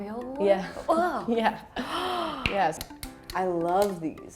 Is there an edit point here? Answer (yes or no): yes